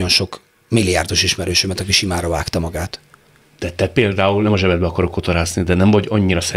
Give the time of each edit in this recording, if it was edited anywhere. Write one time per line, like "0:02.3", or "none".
none